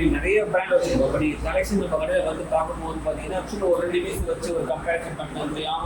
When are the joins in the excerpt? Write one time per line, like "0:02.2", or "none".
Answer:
none